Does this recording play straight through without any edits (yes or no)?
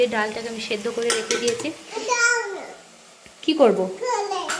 yes